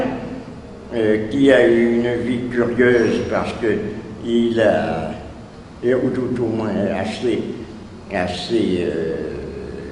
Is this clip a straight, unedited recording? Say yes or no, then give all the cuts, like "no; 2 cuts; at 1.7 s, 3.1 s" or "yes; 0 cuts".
no; 1 cut; at 4.2 s